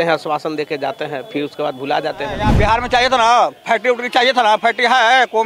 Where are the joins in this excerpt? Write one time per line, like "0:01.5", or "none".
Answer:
0:02.5